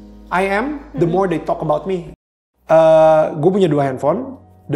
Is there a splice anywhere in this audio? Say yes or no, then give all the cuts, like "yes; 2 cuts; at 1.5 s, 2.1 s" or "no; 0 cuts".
yes; 1 cut; at 2.1 s